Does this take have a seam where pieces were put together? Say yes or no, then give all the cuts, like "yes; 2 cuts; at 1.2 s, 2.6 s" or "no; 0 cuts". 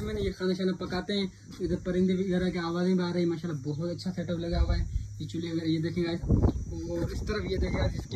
no; 0 cuts